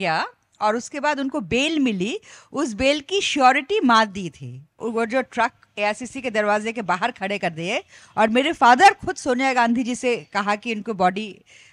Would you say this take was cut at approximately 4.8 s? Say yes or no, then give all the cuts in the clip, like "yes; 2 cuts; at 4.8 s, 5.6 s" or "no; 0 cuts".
yes; 1 cut; at 4.8 s